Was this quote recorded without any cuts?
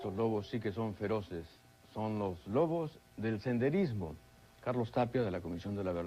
no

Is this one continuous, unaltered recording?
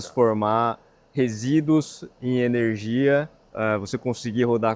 no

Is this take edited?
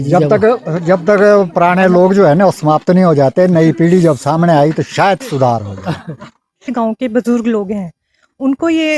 yes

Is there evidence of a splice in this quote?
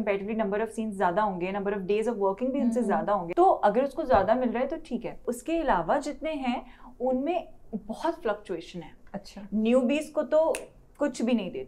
yes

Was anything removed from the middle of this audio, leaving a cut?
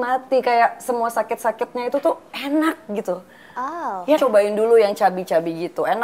yes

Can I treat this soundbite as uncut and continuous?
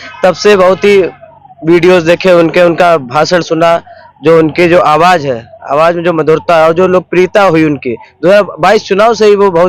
yes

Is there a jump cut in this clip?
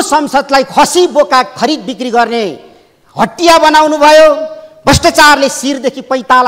no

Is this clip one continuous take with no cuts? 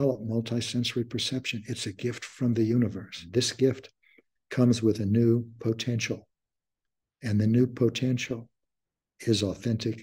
no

